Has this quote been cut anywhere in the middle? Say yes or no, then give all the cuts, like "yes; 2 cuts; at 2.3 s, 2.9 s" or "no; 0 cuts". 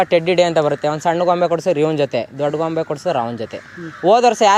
no; 0 cuts